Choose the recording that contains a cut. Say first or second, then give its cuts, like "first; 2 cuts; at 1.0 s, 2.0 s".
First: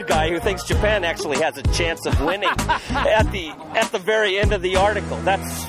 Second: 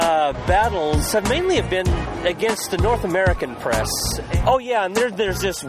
second; 1 cut; at 4.2 s